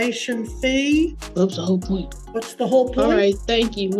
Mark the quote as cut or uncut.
cut